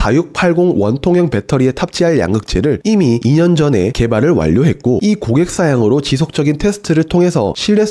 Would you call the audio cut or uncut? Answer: uncut